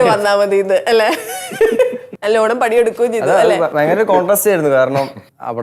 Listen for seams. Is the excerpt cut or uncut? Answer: uncut